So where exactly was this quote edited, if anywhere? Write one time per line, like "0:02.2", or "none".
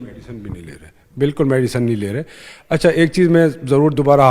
none